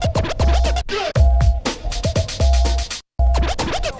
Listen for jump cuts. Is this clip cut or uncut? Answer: cut